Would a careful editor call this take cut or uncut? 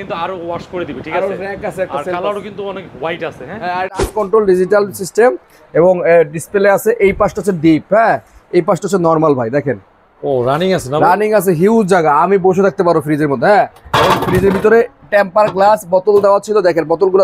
cut